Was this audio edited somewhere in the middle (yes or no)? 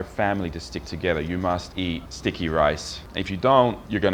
yes